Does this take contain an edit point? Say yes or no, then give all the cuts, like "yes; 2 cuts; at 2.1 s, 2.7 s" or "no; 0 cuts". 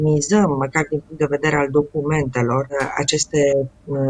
yes; 1 cut; at 2.8 s